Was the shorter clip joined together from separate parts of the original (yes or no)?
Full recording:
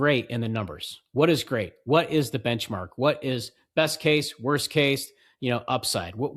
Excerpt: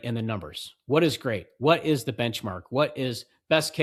no